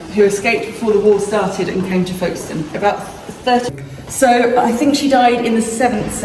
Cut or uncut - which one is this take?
cut